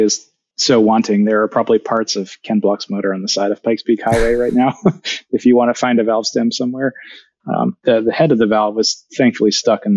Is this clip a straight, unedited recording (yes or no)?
yes